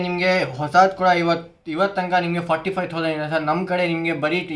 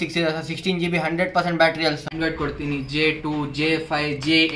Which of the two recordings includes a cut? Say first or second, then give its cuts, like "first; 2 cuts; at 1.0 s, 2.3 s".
second; 1 cut; at 2.1 s